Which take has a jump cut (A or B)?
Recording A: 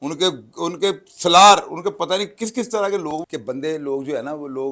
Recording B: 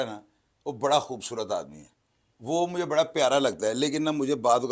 A